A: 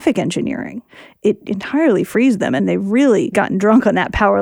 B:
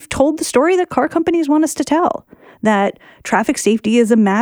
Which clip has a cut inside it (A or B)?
A